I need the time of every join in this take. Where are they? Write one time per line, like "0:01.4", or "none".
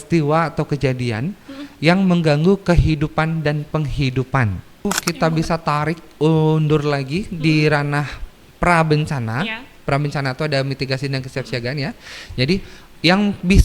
0:04.8